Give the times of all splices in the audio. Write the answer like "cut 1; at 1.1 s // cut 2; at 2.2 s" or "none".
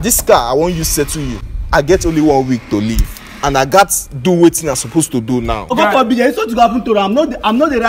cut 1; at 1.5 s // cut 2; at 5.7 s